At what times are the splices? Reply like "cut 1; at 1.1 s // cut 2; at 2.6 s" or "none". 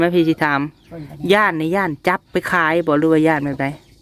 none